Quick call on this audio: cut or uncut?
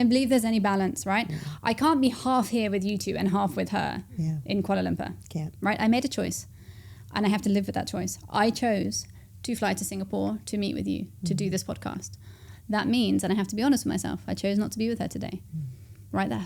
uncut